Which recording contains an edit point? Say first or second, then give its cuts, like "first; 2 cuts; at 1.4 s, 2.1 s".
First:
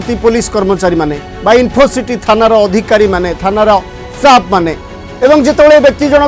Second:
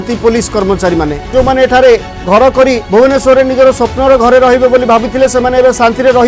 second; 2 cuts; at 1.3 s, 2.8 s